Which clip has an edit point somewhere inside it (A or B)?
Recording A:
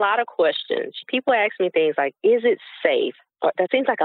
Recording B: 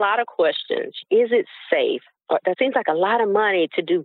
B